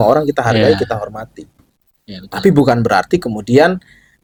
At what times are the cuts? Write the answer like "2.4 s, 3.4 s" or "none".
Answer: none

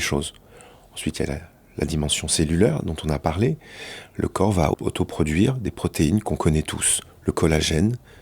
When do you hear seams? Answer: 4.7 s

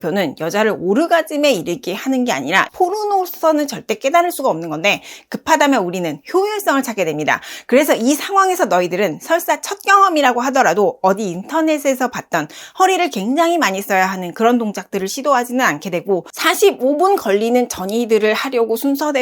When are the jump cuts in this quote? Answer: 2.7 s

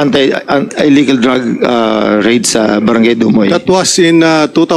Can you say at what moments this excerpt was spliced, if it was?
none

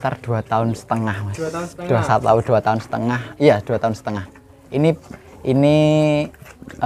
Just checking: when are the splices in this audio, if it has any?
none

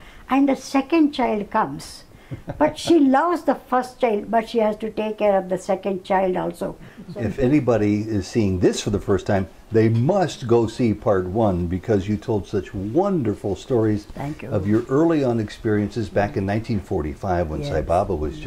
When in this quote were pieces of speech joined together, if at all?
7.0 s

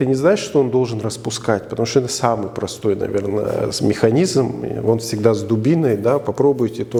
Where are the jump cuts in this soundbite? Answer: none

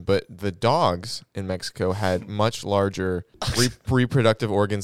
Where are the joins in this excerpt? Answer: 3.4 s

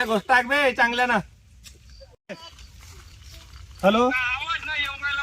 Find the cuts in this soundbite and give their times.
2.2 s

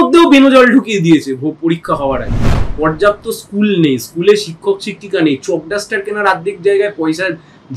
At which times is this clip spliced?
2.6 s

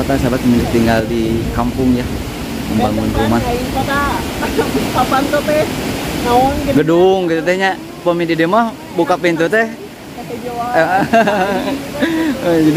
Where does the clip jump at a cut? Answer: none

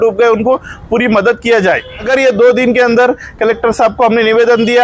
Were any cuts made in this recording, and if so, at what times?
2.1 s

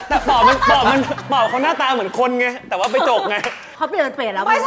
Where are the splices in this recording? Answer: 3.7 s

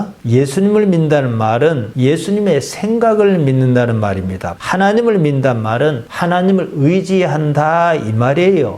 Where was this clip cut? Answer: 4.5 s

